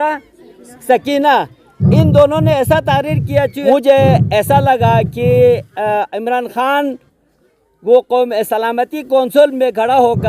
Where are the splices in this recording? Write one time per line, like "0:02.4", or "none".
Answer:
0:03.7